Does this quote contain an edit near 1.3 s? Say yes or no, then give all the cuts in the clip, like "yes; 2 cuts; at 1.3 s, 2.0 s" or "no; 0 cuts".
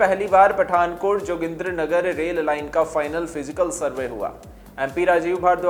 no; 0 cuts